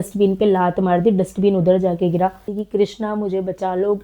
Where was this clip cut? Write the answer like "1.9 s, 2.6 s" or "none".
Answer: 2.5 s